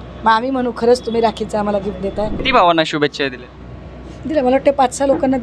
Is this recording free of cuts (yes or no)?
no